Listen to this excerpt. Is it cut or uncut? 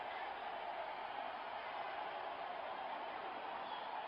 uncut